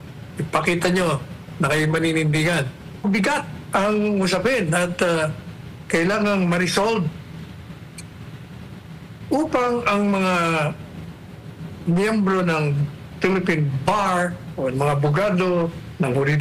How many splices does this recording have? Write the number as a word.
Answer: one